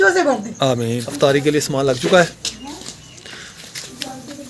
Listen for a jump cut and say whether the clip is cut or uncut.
cut